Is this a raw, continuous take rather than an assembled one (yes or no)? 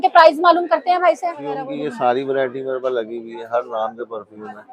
no